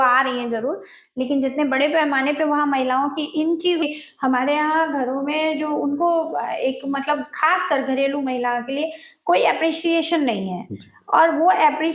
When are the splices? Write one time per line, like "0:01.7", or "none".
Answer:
0:03.8